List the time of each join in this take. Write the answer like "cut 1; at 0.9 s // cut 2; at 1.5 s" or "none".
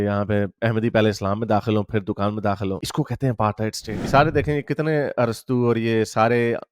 cut 1; at 4.0 s